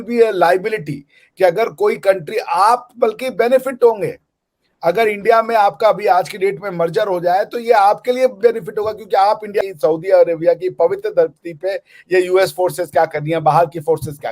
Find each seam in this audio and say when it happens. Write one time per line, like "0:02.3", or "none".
0:09.6